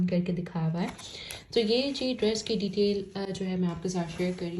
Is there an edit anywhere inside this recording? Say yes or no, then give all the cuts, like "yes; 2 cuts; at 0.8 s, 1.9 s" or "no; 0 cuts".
no; 0 cuts